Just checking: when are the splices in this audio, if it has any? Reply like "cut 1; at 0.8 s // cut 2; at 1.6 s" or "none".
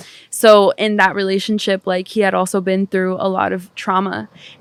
none